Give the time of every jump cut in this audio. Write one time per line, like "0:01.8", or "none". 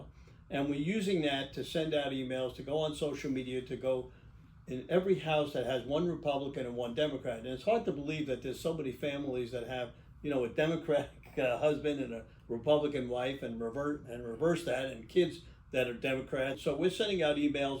0:16.5